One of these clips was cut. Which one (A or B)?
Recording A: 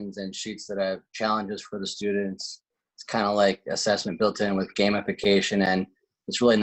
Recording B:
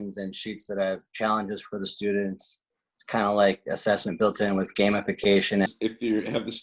B